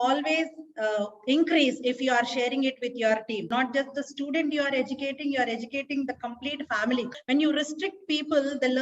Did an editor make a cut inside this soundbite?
yes; 2 cuts; at 3.5 s, 7.2 s

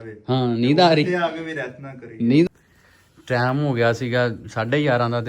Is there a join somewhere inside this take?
yes; 1 cut; at 2.5 s

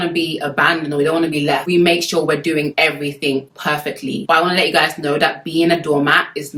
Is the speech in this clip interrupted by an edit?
no; 0 cuts

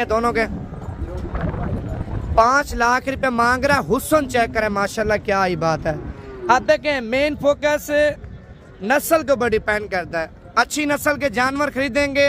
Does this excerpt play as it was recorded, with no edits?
yes; 0 cuts

